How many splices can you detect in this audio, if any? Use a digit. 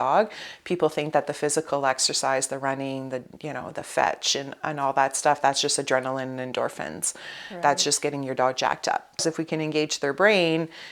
1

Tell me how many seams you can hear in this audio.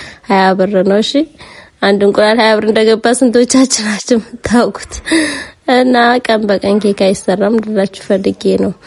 0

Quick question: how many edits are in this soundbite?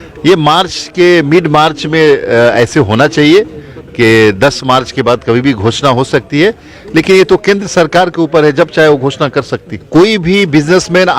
1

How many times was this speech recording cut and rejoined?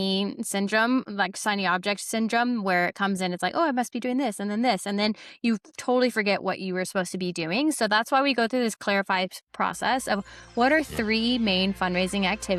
0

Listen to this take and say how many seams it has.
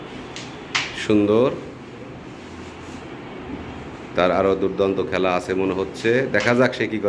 0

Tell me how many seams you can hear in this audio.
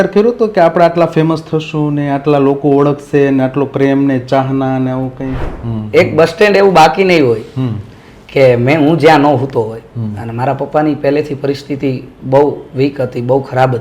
1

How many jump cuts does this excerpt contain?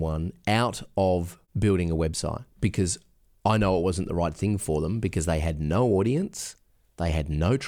1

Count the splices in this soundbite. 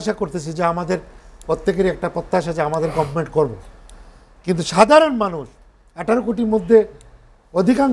0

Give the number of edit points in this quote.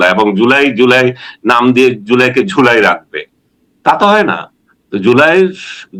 0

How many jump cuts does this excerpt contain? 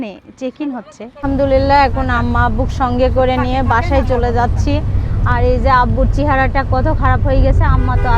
1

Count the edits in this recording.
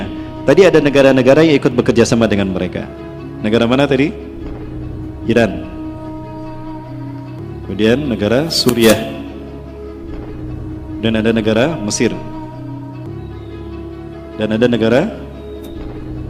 3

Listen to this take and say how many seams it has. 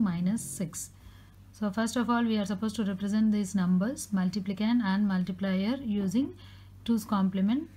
1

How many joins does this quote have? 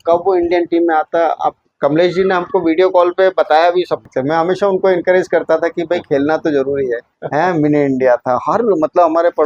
3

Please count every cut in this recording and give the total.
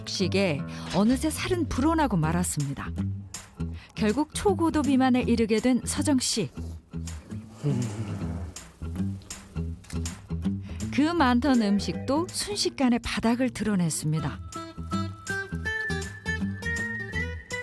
0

